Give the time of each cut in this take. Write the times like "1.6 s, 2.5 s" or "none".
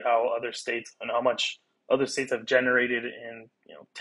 none